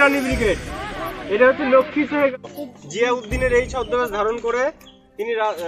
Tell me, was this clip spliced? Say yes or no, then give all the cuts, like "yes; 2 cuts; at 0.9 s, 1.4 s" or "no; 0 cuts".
yes; 1 cut; at 2.3 s